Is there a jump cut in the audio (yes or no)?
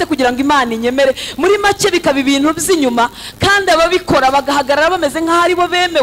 no